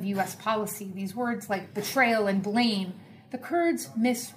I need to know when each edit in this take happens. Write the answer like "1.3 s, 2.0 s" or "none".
2.3 s